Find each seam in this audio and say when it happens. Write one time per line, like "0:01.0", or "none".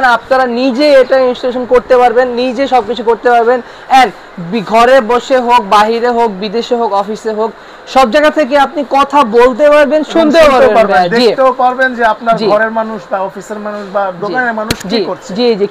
none